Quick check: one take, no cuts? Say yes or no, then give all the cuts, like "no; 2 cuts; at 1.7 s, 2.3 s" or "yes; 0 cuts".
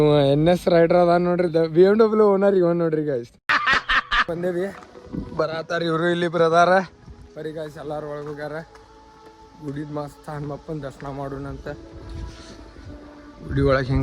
no; 1 cut; at 4.3 s